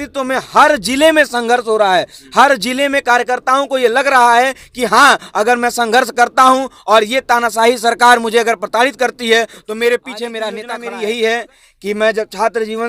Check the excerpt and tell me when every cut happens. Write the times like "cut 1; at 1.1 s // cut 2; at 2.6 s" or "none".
cut 1; at 10.7 s